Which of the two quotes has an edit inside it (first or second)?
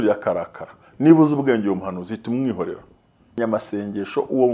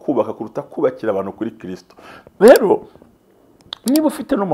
first